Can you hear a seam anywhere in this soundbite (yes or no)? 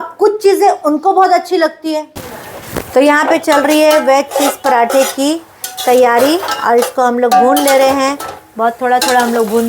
yes